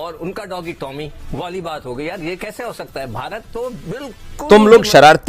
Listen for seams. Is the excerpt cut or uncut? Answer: cut